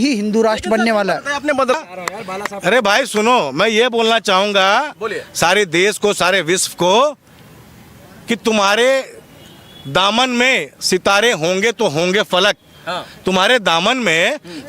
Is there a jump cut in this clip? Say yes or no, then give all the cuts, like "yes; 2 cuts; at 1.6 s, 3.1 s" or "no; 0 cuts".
yes; 1 cut; at 1.8 s